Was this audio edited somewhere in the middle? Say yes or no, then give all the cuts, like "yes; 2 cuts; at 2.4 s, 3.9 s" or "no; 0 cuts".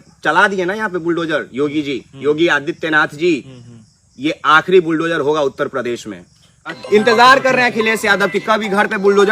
yes; 1 cut; at 6.7 s